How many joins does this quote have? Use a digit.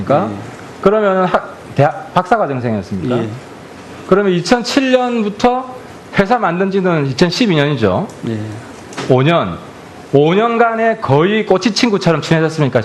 1